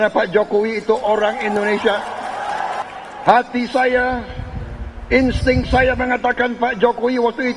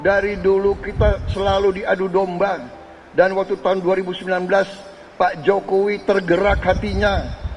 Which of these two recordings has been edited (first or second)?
first